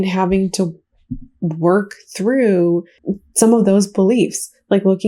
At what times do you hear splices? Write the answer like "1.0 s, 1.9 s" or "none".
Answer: 2.9 s